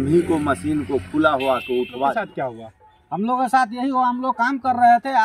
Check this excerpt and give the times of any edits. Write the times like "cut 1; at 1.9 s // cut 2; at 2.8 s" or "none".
cut 1; at 2.3 s